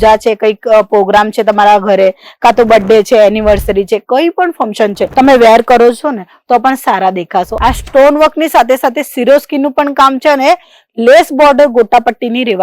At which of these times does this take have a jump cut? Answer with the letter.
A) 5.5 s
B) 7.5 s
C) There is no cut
B